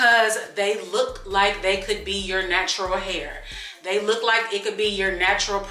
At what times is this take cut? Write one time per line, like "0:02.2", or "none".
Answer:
none